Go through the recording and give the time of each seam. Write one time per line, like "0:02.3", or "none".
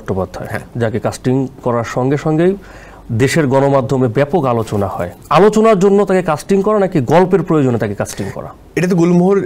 none